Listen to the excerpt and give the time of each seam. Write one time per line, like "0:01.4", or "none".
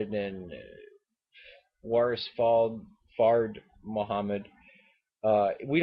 0:03.0